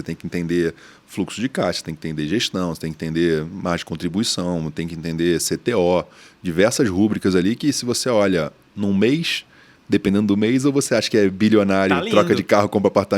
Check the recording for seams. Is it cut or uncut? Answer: uncut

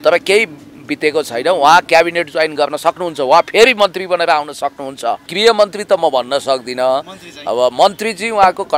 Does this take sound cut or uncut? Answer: cut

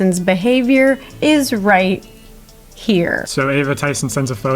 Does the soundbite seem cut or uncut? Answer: cut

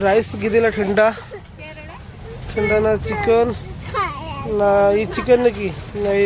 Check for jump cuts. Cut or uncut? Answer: uncut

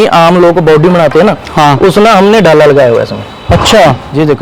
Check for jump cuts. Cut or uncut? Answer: uncut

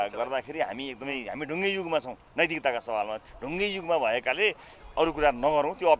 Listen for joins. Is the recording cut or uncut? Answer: uncut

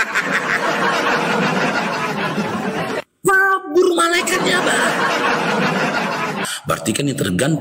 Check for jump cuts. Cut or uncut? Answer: cut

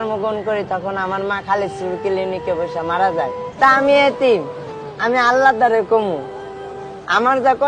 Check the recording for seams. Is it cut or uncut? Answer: cut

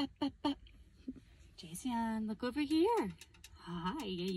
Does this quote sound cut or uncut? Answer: uncut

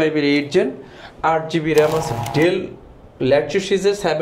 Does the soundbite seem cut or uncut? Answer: cut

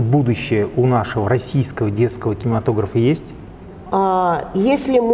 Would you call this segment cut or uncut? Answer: uncut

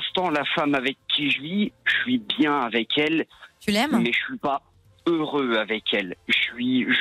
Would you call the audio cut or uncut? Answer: uncut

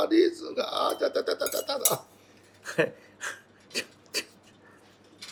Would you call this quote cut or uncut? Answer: uncut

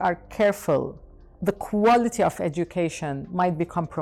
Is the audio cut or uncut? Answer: uncut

